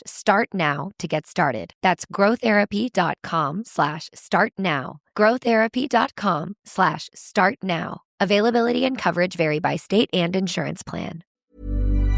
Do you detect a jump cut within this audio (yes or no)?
yes